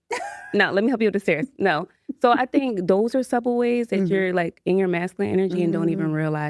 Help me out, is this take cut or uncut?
uncut